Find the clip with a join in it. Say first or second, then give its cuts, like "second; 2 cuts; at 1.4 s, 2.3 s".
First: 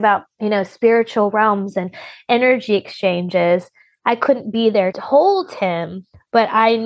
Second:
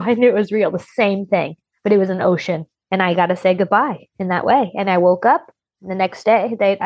first; 1 cut; at 5.0 s